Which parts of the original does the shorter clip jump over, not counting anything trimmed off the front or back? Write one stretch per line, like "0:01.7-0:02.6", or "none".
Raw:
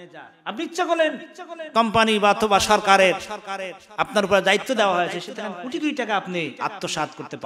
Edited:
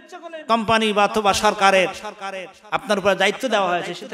none